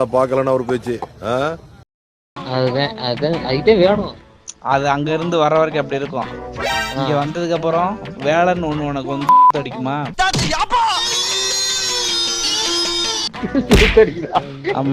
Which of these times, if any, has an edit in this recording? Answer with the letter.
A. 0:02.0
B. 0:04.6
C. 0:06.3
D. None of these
A